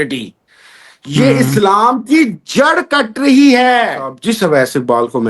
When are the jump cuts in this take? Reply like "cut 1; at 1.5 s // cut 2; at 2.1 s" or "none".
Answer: cut 1; at 4.2 s